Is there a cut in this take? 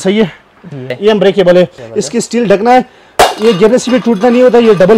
yes; 2 cuts; at 0.9 s, 1.8 s

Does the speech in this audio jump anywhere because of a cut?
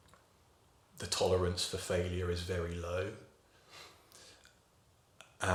no; 0 cuts

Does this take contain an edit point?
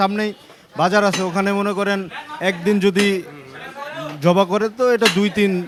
no; 0 cuts

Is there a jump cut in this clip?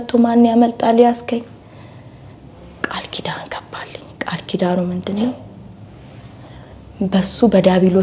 no; 0 cuts

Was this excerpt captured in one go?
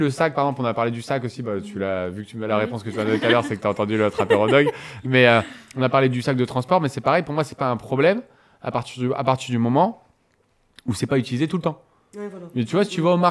yes; 0 cuts

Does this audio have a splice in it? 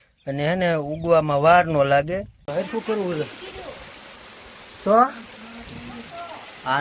yes; 1 cut; at 2.5 s

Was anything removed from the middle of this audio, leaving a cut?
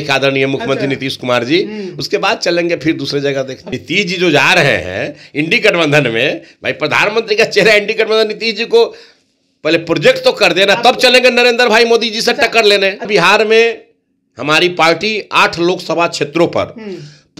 yes; 2 cuts; at 3.6 s, 13.1 s

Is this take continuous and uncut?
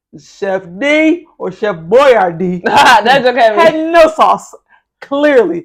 yes; 0 cuts

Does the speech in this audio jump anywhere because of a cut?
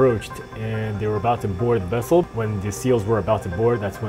yes; 1 cut; at 2.3 s

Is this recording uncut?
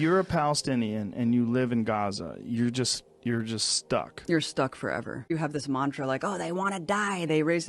no; 1 cut; at 5.3 s

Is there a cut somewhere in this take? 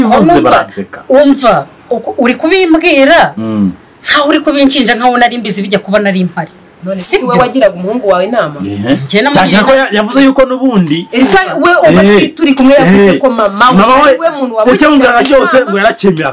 no; 0 cuts

